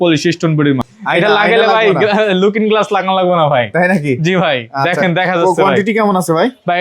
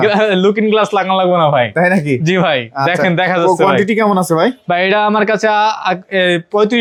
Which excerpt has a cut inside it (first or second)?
first